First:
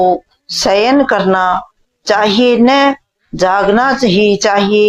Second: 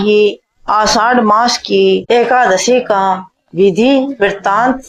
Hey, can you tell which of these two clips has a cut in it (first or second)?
second